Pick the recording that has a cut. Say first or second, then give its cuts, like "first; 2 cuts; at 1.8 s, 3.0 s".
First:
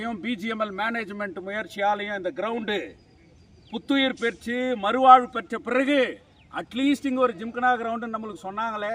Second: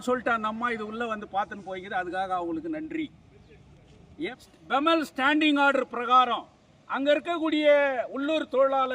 second; 1 cut; at 4.3 s